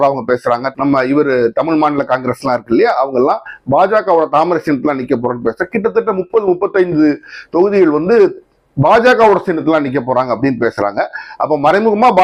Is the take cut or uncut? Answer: uncut